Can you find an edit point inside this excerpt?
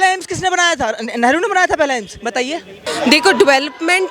yes; 1 cut; at 2.8 s

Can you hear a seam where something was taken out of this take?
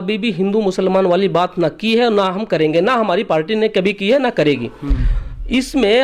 no; 0 cuts

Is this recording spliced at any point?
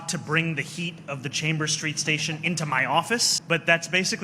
yes; 1 cut; at 3.3 s

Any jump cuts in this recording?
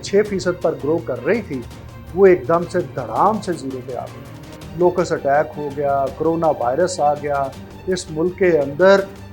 no; 0 cuts

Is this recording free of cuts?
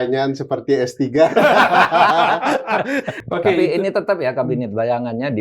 no; 1 cut; at 3.1 s

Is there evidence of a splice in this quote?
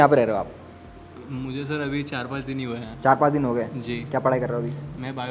no; 0 cuts

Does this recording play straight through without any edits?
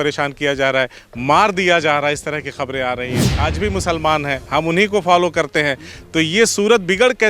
no; 1 cut; at 3.2 s

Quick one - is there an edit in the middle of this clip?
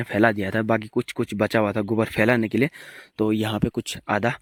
no; 0 cuts

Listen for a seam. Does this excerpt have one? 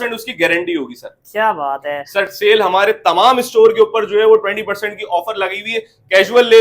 yes; 1 cut; at 2.0 s

